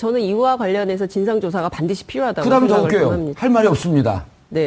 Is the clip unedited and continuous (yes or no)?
no